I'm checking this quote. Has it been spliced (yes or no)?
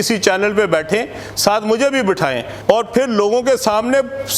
yes